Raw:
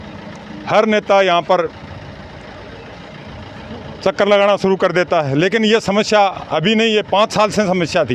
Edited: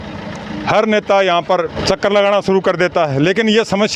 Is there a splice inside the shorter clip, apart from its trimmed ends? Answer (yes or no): yes